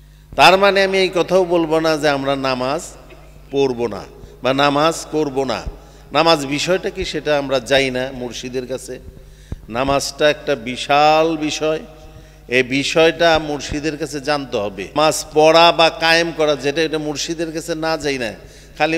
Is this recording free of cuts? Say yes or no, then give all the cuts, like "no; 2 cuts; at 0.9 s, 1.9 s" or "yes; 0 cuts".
no; 1 cut; at 14.9 s